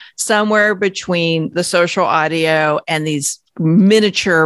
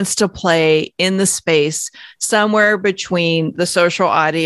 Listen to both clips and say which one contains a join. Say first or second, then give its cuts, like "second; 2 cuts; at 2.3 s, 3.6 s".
second; 1 cut; at 0.9 s